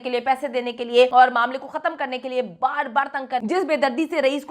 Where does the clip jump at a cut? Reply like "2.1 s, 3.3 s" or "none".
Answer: 1.1 s, 3.4 s

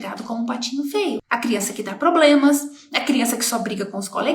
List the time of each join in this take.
1.2 s

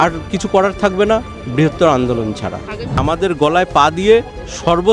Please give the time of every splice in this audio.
3.0 s

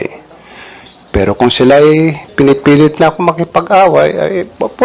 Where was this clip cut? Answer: none

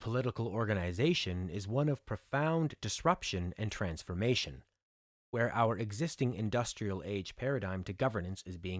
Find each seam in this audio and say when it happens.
7.3 s

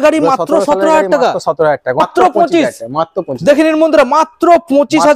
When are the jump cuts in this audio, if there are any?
2.0 s

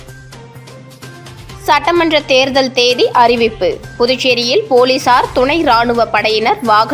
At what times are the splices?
none

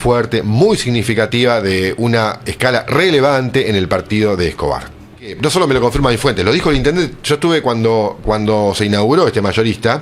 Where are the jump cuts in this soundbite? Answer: 5.3 s

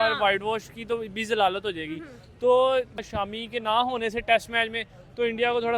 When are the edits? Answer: 3.1 s

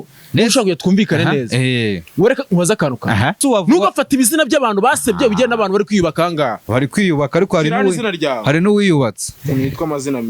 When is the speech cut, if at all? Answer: 3.4 s, 9.3 s

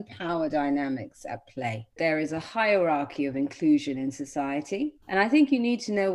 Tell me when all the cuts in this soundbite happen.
2.0 s, 5.0 s

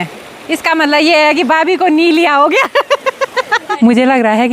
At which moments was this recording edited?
3.6 s

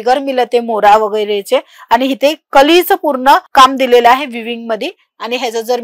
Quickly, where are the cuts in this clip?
none

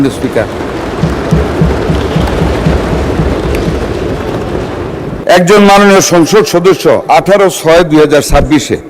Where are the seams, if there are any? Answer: 5.2 s

